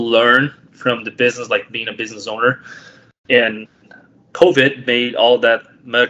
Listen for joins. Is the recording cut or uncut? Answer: uncut